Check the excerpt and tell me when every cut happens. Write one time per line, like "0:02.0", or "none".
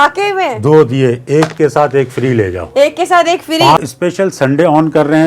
0:03.8